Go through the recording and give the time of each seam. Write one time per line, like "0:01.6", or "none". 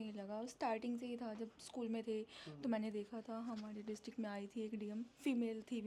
none

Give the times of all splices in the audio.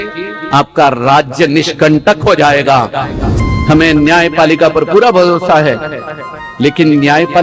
0:03.2

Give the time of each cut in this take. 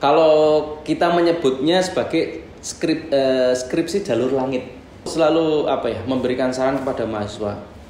0:05.1

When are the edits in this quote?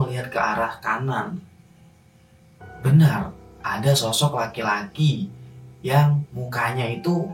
none

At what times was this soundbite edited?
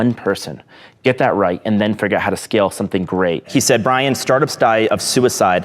0:03.5

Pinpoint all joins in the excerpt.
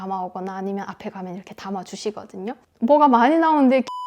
0:02.6

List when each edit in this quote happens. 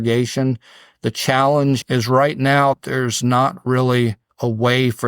0:01.8

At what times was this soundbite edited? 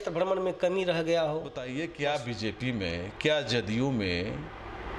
0:01.7

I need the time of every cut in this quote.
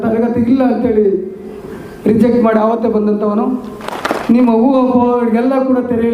0:03.9

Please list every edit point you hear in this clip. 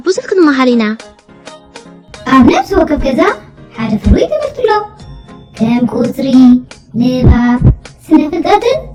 none

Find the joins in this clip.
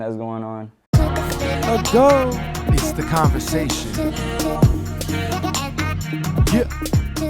0:00.9

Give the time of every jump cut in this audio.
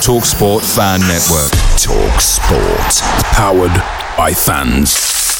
none

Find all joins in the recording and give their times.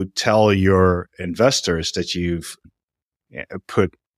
0:02.6

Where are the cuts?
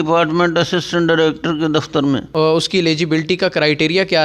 0:02.3

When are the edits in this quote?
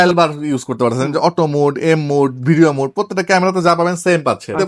none

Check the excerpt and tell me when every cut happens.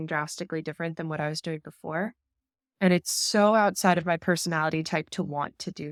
none

